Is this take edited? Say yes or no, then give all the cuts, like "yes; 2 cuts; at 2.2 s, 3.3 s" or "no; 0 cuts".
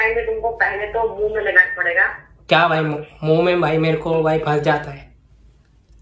no; 0 cuts